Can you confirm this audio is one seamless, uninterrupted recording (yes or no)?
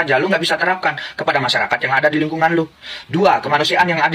yes